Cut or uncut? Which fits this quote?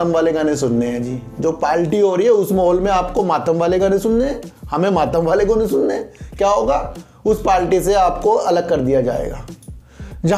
uncut